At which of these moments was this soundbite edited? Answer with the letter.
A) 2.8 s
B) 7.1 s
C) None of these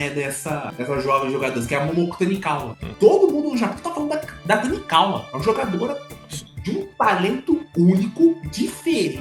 A